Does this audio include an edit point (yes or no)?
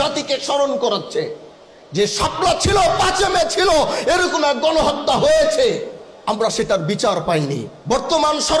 yes